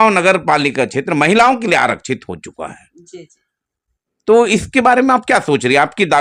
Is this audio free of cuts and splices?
yes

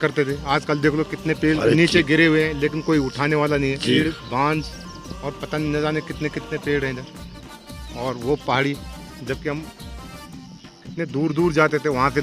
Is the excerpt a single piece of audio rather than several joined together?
no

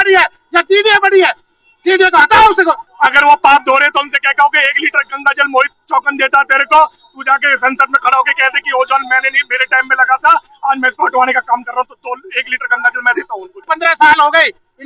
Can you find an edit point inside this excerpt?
yes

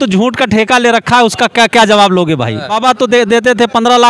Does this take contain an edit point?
yes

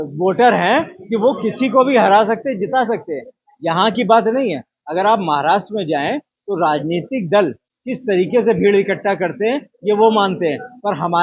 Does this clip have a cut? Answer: no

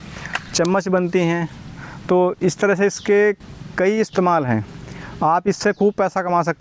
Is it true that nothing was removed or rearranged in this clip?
yes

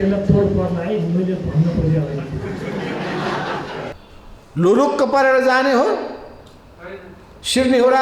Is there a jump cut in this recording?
yes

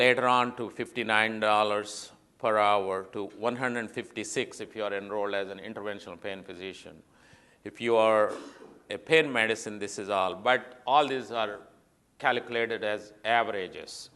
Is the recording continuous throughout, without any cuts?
no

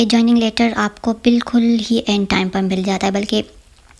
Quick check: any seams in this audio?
no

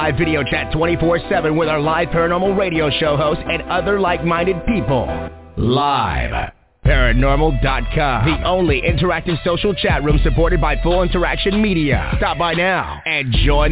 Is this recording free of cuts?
yes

